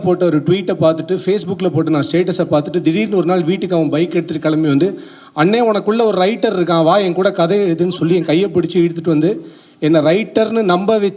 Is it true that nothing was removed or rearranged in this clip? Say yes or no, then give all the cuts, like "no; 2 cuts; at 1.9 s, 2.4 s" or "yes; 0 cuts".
yes; 0 cuts